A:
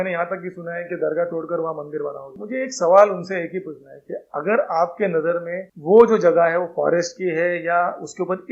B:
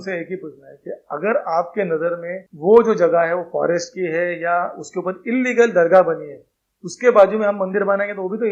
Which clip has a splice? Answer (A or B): A